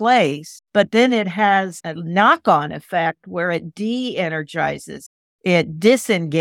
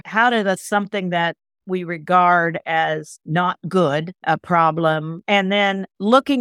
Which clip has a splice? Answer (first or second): second